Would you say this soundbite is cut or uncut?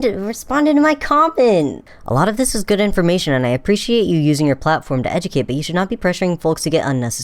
cut